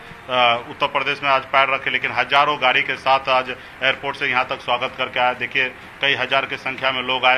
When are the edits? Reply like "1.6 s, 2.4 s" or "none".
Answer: none